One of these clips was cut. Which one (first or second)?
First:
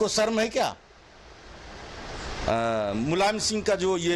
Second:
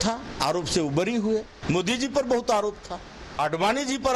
second